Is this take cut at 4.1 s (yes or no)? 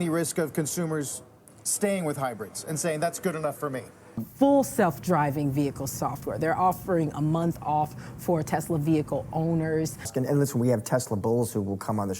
yes